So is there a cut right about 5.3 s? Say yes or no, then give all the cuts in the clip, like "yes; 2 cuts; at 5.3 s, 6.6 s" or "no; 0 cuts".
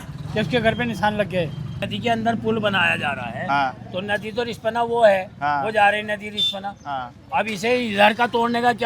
no; 1 cut; at 1.8 s